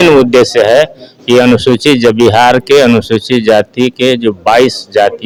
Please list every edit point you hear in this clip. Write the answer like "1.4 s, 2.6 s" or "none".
none